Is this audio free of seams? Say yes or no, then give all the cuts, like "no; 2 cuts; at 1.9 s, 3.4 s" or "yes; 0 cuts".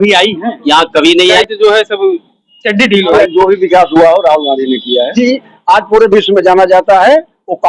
no; 3 cuts; at 1.4 s, 3.1 s, 5.1 s